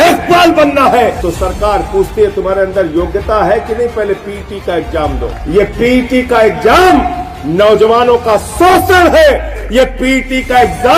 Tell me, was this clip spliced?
yes; 3 cuts; at 1.2 s, 5.3 s, 9.6 s

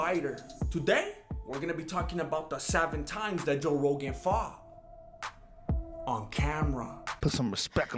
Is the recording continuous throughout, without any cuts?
yes; 0 cuts

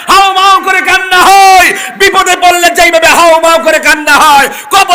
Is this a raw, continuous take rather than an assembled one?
yes; 0 cuts

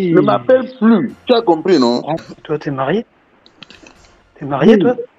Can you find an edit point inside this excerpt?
yes; 1 cut; at 2.2 s

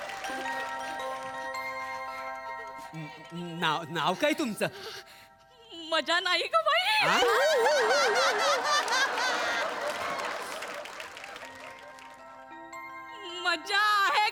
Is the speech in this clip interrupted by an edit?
no; 0 cuts

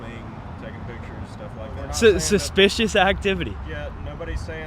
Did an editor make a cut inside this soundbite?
yes; 1 cut; at 1.7 s

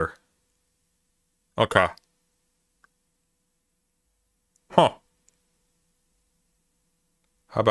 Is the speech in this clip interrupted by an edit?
no; 0 cuts

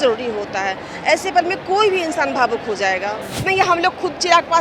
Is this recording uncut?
no; 1 cut; at 3.4 s

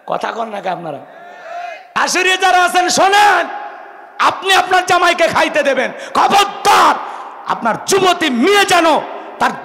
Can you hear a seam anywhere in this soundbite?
yes; 1 cut; at 1.8 s

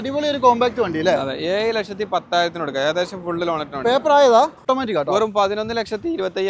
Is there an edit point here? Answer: yes; 1 cut; at 4.6 s

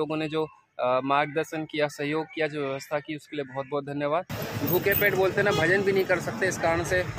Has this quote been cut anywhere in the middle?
yes; 1 cut; at 4.4 s

